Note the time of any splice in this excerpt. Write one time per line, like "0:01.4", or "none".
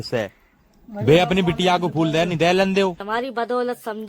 0:03.1